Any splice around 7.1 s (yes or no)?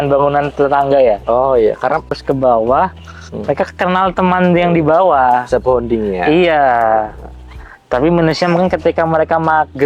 no